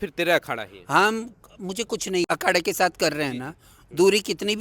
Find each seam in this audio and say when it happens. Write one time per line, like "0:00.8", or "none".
0:02.2